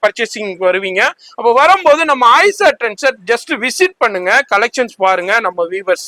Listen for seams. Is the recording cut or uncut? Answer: uncut